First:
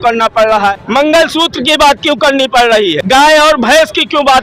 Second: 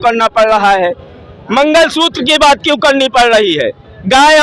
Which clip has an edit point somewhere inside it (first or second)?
first